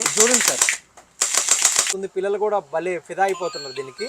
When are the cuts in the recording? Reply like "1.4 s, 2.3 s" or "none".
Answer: 1.9 s